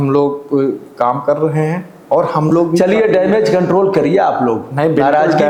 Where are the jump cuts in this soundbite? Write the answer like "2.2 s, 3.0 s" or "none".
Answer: none